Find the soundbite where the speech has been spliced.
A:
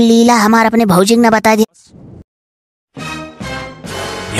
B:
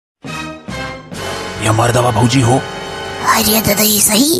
A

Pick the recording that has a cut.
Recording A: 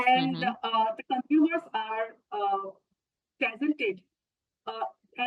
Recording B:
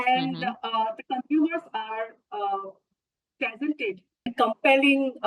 B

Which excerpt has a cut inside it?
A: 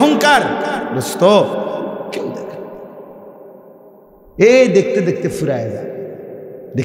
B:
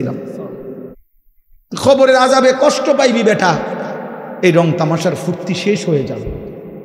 B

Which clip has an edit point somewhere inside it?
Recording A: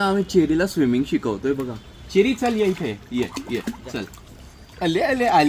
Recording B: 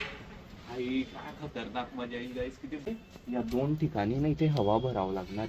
B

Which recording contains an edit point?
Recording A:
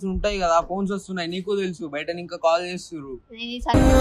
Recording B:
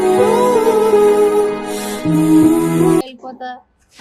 B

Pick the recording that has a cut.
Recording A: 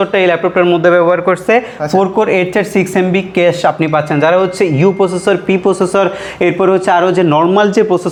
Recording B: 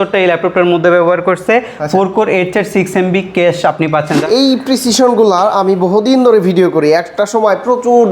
B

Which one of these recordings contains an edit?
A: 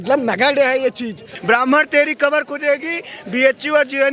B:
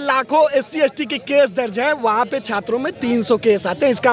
A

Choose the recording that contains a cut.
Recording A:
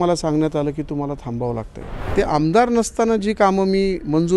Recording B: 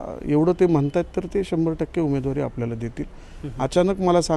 A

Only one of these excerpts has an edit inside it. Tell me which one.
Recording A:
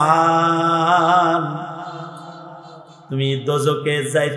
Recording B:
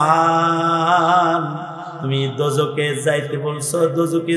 B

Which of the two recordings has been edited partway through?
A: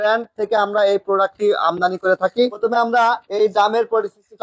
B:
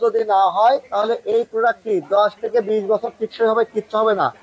A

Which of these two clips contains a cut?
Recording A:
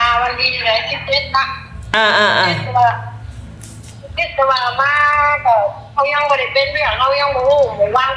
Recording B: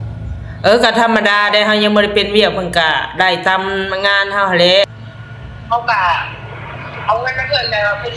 B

